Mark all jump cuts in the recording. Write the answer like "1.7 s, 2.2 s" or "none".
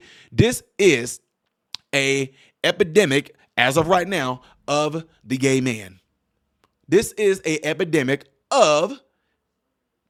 none